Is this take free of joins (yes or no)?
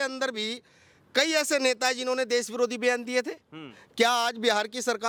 yes